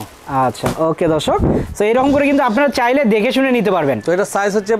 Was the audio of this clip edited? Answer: no; 0 cuts

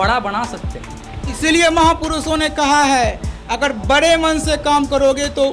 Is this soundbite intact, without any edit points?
yes; 0 cuts

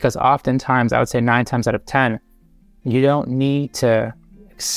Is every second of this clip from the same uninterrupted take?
yes; 0 cuts

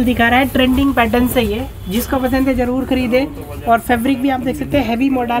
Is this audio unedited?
yes; 0 cuts

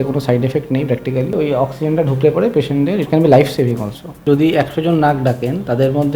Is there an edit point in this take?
yes; 2 cuts; at 1.3 s, 4.1 s

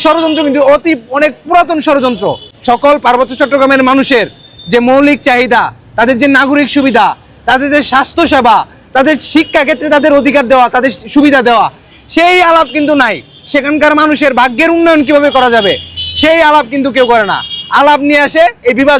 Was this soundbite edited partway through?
yes; 1 cut; at 2.5 s

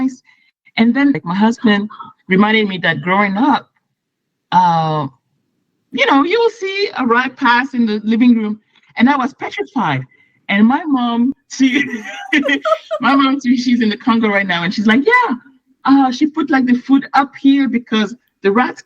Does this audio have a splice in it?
yes; 1 cut; at 1.2 s

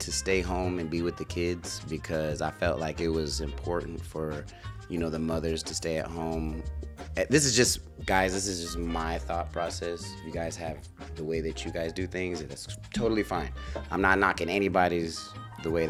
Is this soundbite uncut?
yes; 0 cuts

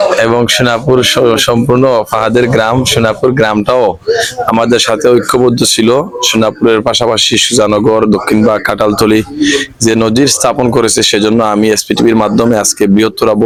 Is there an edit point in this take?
no; 0 cuts

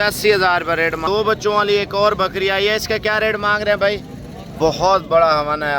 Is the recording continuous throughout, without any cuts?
no; 2 cuts; at 1.0 s, 4.5 s

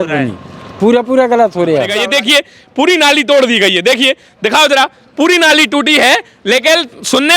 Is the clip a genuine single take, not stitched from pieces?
no; 1 cut; at 1.9 s

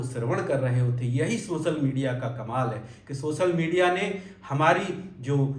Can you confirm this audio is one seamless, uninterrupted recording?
yes; 0 cuts

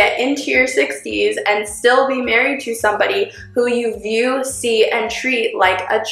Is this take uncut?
yes; 0 cuts

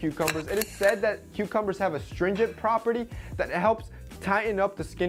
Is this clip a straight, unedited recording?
yes; 0 cuts

